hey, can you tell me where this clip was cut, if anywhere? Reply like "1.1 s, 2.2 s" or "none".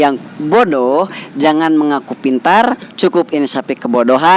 none